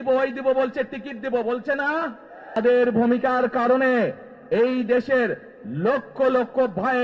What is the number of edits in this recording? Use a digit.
1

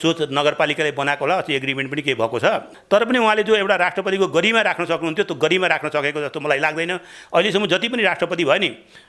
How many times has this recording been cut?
1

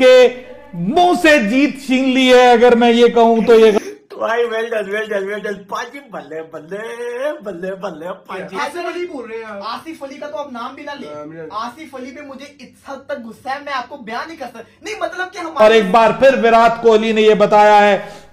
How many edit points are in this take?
3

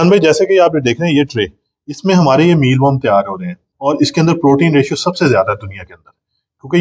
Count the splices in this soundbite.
1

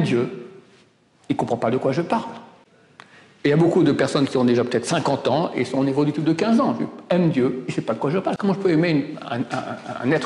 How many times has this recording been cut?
0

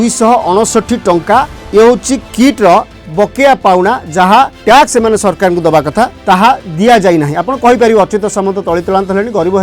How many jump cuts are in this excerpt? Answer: 3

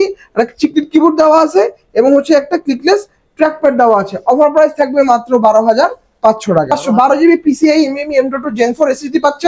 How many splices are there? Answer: 1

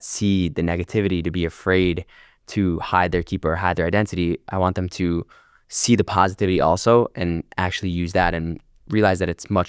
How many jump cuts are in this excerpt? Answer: 0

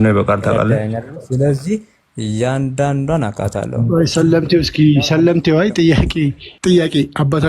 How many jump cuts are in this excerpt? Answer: 1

